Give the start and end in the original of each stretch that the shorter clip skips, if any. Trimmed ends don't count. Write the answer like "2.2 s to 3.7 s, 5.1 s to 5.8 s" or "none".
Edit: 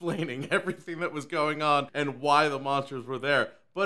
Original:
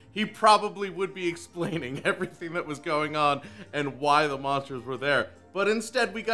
3.4 s to 3.7 s